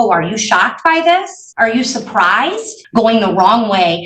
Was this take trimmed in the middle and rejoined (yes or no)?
yes